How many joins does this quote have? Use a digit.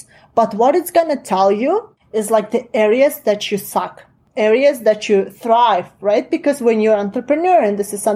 2